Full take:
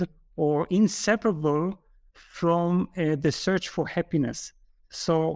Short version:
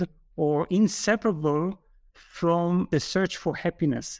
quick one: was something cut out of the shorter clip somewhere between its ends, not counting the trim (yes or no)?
yes